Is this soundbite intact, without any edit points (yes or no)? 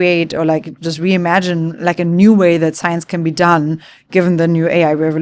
yes